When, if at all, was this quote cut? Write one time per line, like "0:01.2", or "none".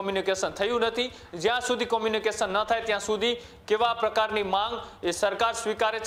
none